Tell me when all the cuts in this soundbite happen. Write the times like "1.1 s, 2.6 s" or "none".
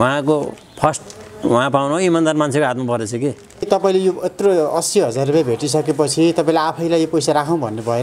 3.7 s